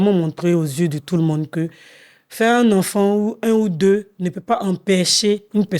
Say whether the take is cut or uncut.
uncut